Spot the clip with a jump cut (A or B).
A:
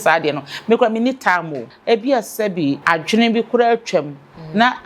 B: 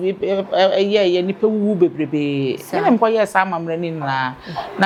A